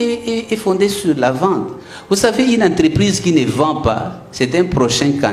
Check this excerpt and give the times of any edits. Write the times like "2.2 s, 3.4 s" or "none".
none